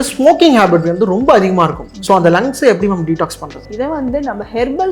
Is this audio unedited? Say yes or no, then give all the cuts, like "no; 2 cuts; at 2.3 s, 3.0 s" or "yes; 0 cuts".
no; 2 cuts; at 1.9 s, 3.7 s